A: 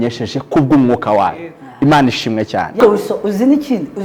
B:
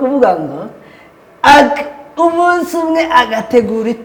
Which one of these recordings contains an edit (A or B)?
A